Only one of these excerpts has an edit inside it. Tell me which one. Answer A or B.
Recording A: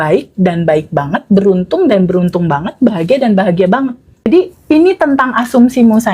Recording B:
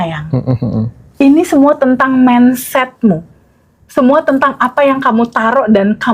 A